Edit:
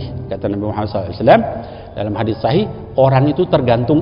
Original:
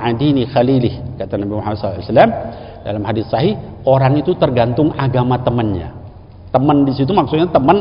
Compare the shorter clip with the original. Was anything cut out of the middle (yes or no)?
no